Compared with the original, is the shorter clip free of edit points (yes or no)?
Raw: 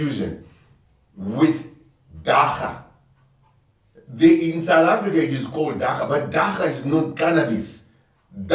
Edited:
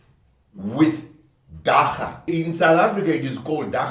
no